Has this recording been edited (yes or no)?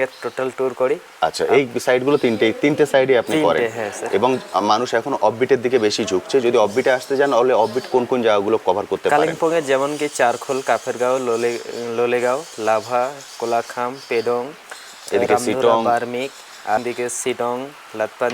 yes